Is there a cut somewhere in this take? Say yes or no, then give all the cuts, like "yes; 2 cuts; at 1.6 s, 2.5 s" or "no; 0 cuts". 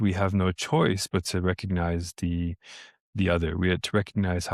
no; 0 cuts